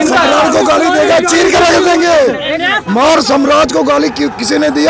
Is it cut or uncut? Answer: uncut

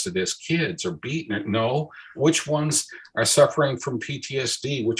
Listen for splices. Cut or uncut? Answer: cut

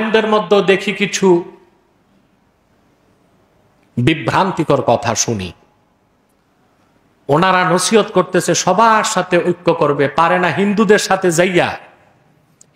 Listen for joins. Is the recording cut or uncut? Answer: uncut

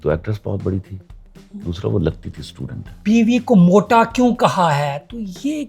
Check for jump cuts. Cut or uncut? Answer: cut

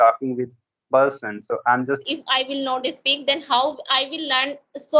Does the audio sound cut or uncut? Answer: cut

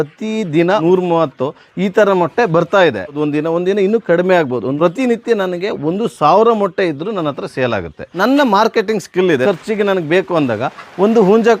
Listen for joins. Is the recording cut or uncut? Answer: cut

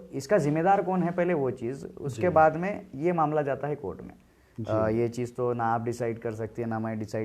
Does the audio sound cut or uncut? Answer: uncut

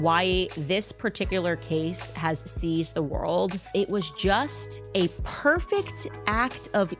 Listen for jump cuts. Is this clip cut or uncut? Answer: uncut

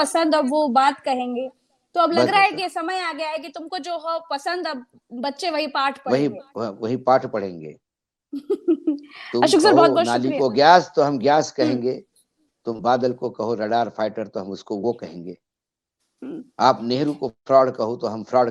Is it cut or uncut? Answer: uncut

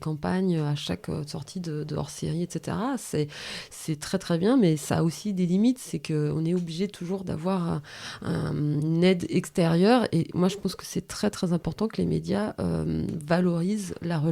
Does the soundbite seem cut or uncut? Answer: uncut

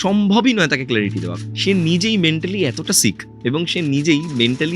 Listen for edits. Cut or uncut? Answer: cut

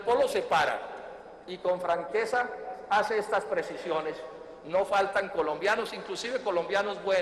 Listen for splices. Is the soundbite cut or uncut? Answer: uncut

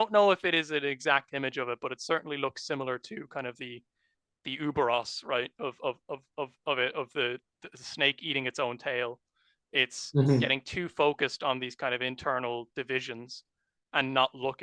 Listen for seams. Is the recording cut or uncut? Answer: uncut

